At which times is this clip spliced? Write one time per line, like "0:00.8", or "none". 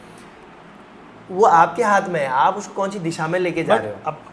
none

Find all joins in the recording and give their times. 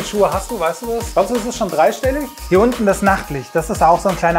0:01.1
0:02.3

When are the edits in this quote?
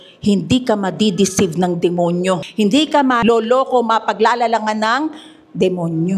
0:02.5
0:03.2

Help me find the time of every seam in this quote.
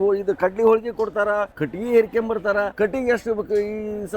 0:01.6
0:02.7

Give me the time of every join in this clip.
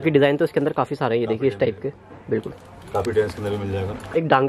none

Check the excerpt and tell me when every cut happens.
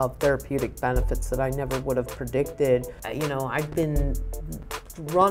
0:03.0

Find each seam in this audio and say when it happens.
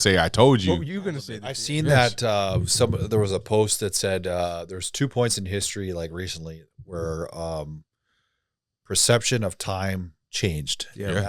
0:01.2

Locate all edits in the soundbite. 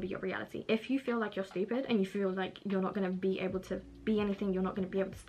none

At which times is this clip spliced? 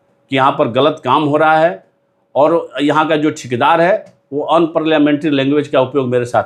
none

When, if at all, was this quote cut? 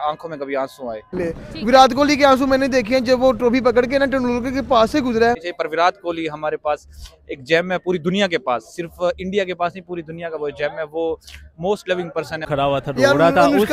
0:01.2
0:05.5
0:12.4

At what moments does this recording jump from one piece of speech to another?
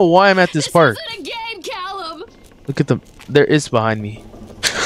0:02.5

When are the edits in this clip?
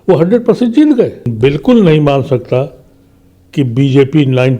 0:01.3

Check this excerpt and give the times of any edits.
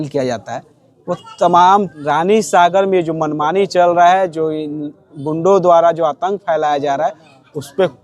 0:02.0

